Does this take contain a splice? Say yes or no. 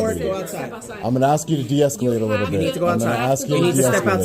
no